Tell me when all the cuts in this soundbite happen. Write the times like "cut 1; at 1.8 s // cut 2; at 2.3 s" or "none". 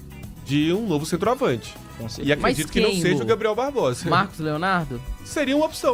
none

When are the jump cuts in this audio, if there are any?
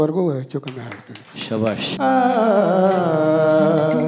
cut 1; at 1.9 s

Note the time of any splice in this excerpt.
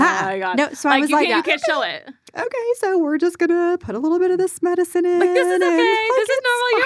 none

